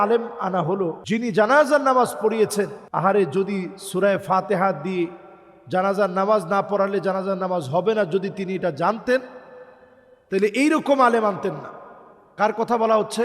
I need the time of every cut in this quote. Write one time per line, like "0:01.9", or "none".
0:01.0
0:02.8